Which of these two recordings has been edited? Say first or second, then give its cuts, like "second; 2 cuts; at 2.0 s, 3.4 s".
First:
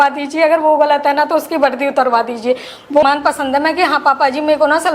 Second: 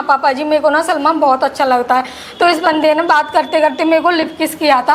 first; 1 cut; at 3.0 s